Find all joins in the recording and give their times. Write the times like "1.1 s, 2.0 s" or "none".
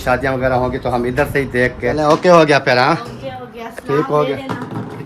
2.0 s